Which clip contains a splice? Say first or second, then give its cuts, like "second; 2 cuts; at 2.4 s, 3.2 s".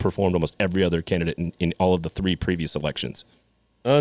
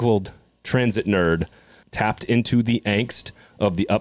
second; 1 cut; at 1.8 s